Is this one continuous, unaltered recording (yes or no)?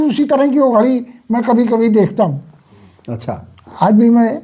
yes